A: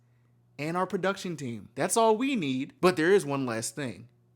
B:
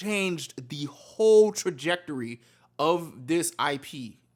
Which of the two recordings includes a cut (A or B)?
A